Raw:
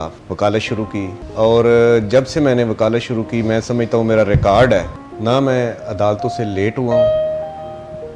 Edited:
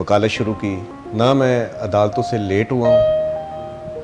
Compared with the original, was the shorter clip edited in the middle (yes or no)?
yes